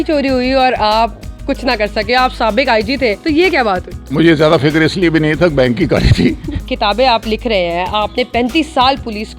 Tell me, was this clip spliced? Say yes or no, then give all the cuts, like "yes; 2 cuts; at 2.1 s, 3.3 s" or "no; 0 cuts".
yes; 2 cuts; at 4.1 s, 6.5 s